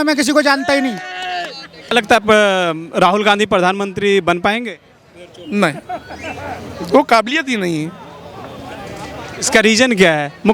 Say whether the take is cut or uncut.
cut